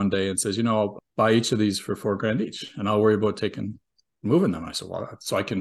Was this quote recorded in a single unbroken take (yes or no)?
no